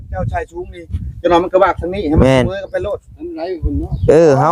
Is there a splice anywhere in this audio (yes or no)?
no